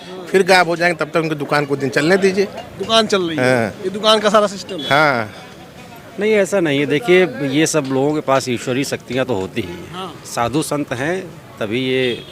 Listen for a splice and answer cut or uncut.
uncut